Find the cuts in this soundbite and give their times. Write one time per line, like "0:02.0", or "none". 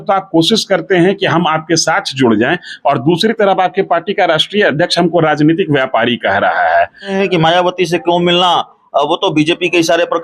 0:07.1